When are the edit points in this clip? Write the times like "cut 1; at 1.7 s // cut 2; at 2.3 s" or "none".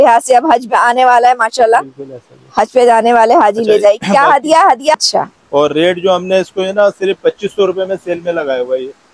cut 1; at 5.0 s